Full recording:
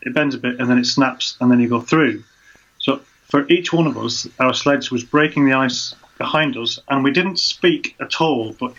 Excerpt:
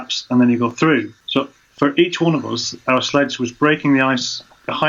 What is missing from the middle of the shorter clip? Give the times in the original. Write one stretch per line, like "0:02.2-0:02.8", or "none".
0:02.3-0:02.7